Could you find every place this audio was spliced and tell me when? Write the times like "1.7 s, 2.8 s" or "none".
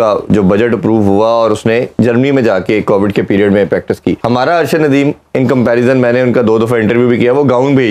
none